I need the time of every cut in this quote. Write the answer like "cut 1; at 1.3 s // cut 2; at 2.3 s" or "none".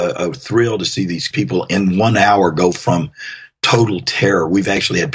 cut 1; at 1.3 s

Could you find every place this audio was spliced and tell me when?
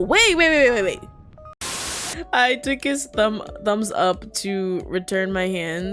cut 1; at 1.6 s

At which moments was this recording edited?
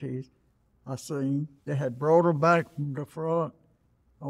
cut 1; at 1.6 s

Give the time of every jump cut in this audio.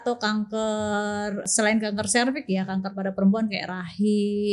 cut 1; at 1.4 s

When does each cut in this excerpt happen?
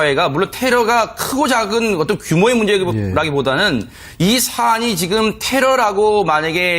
cut 1; at 3.4 s

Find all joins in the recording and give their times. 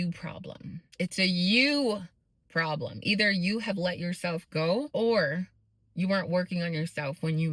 none

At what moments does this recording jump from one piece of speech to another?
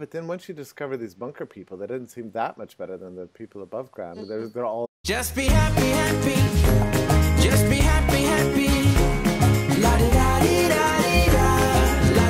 none

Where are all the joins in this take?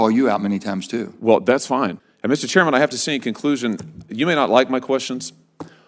cut 1; at 2.0 s

